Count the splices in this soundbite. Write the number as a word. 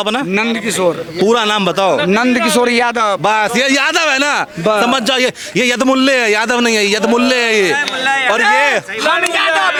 zero